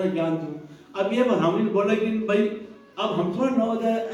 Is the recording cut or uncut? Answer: uncut